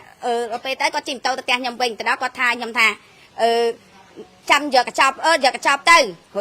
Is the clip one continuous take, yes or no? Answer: yes